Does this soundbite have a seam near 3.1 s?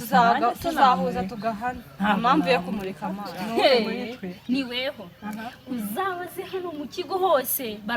yes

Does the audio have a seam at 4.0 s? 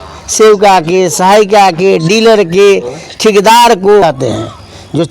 yes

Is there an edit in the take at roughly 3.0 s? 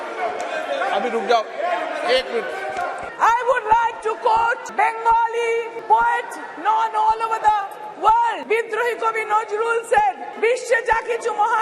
yes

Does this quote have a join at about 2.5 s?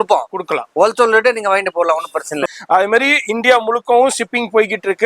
yes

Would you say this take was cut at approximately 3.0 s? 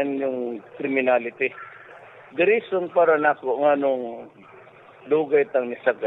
no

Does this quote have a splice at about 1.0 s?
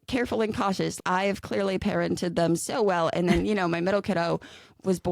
yes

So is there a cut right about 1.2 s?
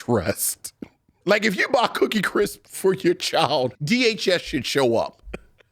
yes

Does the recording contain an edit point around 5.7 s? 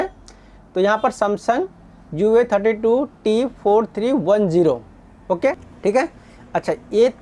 yes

